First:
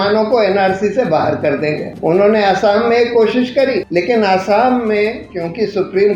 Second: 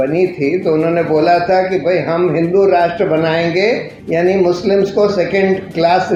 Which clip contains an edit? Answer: first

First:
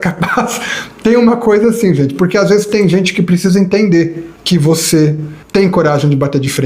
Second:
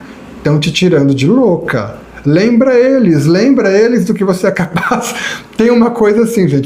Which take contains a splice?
first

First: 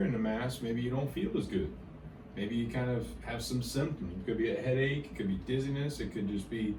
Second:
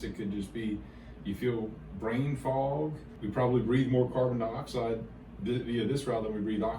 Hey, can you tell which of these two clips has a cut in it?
second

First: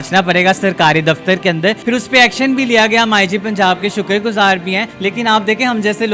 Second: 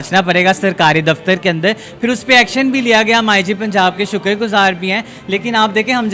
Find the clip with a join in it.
first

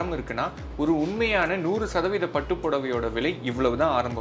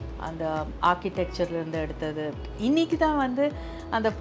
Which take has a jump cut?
second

